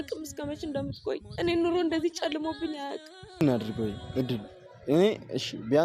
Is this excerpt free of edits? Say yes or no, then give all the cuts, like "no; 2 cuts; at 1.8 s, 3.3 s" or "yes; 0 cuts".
no; 1 cut; at 3.4 s